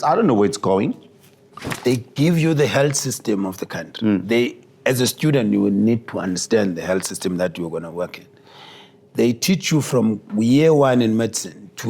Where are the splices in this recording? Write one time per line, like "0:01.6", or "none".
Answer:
0:01.8
0:10.3